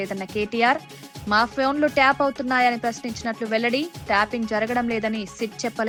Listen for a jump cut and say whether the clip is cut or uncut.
uncut